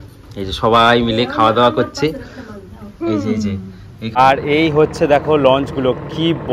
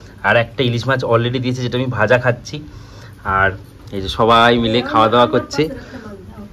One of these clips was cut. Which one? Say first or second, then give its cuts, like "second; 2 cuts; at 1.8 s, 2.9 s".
first; 1 cut; at 4.2 s